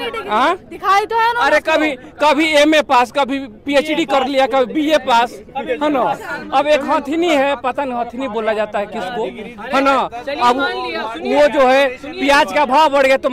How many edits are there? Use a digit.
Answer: 0